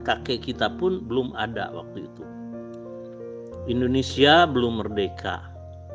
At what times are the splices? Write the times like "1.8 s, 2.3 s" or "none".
1.8 s, 3.7 s